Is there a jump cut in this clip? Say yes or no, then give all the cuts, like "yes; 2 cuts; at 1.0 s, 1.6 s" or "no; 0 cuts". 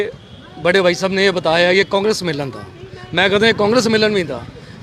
no; 0 cuts